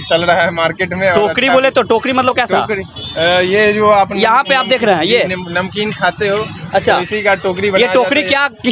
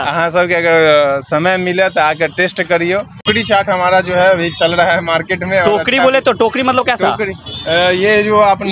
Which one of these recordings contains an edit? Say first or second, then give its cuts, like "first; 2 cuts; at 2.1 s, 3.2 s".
second; 1 cut; at 3.3 s